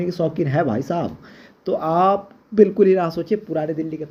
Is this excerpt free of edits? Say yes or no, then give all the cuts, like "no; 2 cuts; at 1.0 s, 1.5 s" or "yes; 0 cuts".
yes; 0 cuts